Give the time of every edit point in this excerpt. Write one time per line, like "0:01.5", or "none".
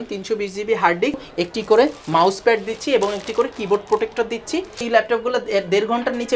0:01.3
0:04.9

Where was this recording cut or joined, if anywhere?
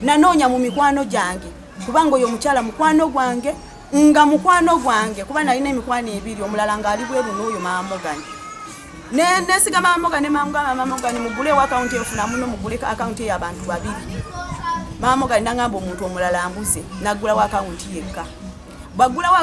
none

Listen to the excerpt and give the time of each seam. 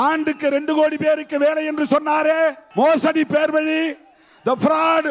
0:02.6

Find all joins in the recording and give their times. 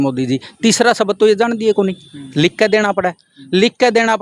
none

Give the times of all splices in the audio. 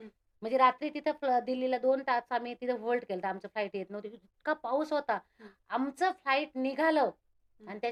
none

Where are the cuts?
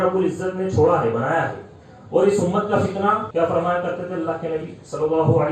0:03.3

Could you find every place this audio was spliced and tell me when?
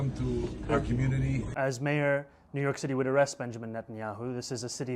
0:01.5

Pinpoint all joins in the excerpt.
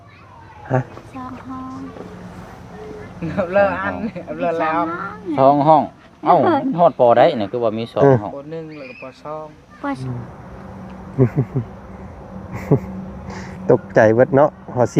0:10.0

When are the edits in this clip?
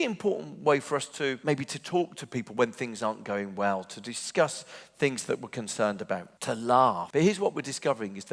0:01.4
0:06.3
0:07.0

